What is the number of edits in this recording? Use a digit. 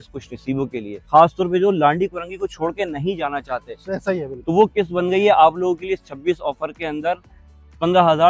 2